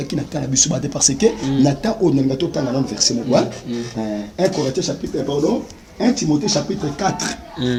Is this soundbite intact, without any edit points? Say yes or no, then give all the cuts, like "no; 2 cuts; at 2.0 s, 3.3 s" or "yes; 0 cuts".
yes; 0 cuts